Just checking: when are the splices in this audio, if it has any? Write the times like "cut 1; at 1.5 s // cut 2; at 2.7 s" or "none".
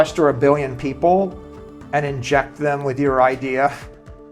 none